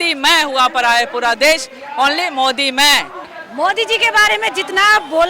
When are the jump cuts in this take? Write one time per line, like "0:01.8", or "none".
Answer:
0:03.2